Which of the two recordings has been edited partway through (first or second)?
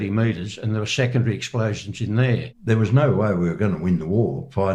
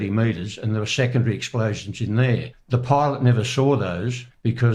first